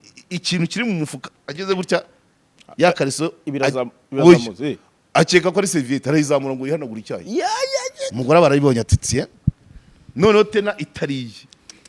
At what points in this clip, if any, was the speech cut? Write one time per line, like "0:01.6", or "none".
none